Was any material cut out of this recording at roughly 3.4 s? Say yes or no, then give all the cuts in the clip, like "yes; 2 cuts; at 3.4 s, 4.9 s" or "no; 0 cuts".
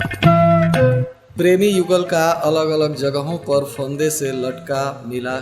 no; 1 cut; at 1.2 s